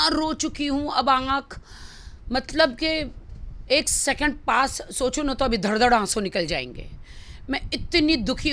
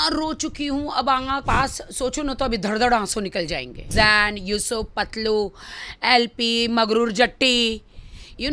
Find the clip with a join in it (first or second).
second